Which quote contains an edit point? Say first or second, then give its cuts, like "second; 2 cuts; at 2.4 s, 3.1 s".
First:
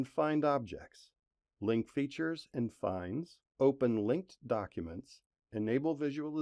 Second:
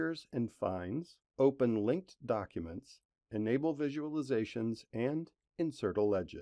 second; 1 cut; at 5.4 s